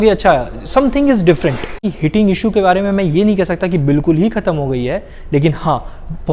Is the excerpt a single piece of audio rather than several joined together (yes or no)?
no